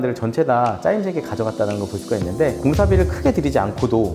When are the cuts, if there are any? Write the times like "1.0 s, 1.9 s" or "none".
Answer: 2.6 s